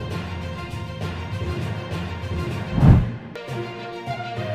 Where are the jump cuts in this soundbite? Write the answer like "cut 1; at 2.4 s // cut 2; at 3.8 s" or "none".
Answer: cut 1; at 2.9 s